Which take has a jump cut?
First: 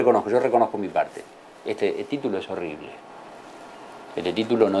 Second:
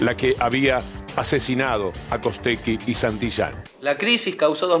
second; 1 cut; at 3.7 s

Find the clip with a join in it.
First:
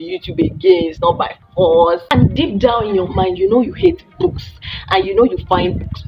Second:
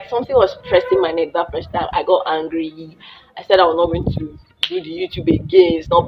first; 1 cut; at 2.1 s

